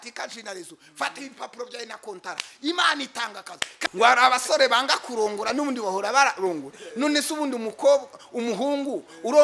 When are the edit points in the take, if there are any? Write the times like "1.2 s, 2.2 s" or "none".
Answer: 3.9 s

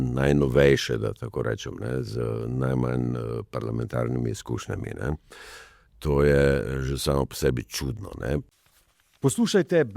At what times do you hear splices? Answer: 8.6 s

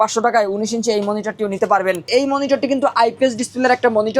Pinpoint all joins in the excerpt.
2.1 s

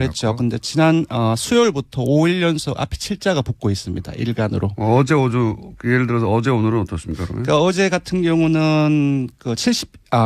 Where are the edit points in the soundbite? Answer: 4.8 s

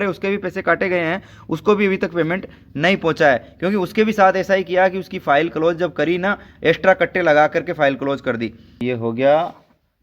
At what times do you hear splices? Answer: 8.8 s

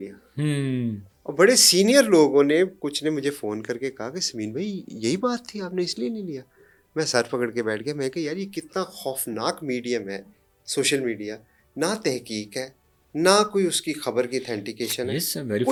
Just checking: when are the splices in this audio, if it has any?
none

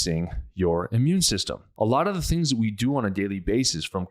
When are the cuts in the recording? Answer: 1.6 s

